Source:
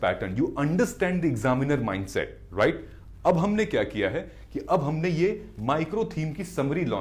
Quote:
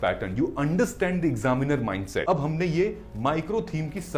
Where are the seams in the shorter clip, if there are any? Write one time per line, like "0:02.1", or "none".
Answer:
0:02.2